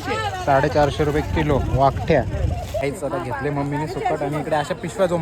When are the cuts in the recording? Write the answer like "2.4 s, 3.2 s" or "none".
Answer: 2.8 s